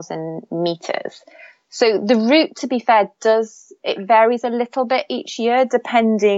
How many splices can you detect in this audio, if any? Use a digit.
0